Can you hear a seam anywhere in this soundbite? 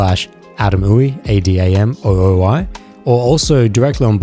no; 0 cuts

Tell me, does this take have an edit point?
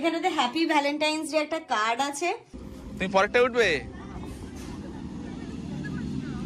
yes; 1 cut; at 2.6 s

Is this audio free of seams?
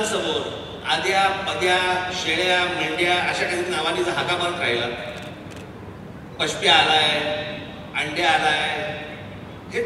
yes; 0 cuts

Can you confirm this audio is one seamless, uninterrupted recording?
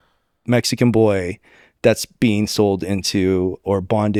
yes; 0 cuts

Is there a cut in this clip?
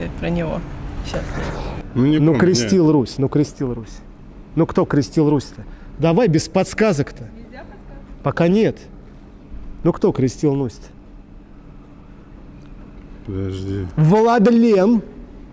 yes; 1 cut; at 1.8 s

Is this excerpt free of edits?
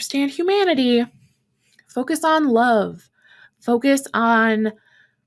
yes; 0 cuts

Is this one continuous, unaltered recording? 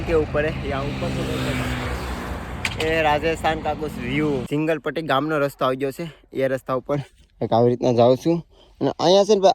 no; 1 cut; at 4.5 s

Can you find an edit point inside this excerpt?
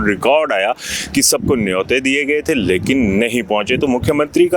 no; 0 cuts

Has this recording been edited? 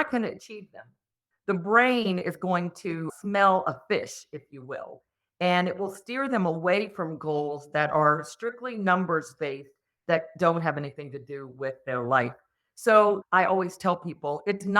yes; 1 cut; at 13.2 s

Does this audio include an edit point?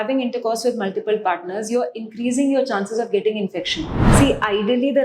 yes; 1 cut; at 4.0 s

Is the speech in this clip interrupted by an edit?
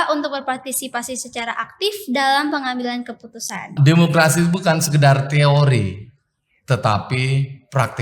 yes; 1 cut; at 3.7 s

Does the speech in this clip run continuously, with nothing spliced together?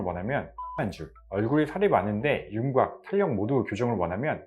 no; 1 cut; at 1.2 s

